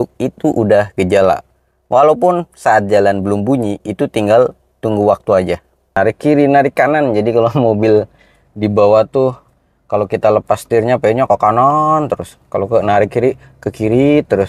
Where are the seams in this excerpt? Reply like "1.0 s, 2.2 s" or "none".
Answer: 6.0 s